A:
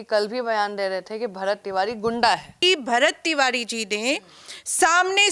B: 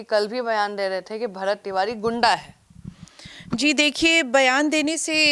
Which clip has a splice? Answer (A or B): A